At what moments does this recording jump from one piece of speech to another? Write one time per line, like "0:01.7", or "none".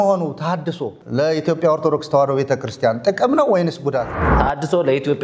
0:00.9
0:04.3